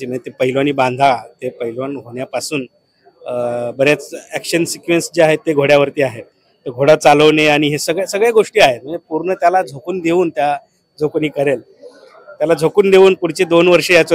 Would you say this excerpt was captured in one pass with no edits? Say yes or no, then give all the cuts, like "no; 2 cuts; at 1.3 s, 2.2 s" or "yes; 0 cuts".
yes; 0 cuts